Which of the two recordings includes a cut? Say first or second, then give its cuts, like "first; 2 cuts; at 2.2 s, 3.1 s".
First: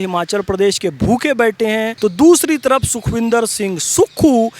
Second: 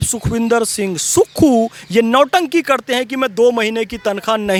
first; 1 cut; at 1.9 s